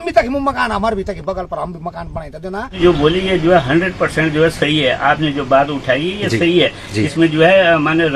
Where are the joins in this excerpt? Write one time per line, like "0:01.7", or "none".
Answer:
0:02.7